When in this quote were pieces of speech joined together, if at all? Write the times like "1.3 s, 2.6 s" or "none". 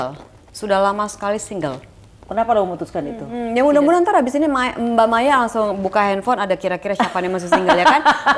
3.3 s